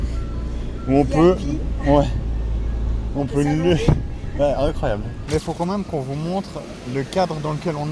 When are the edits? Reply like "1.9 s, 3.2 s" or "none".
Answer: 5.2 s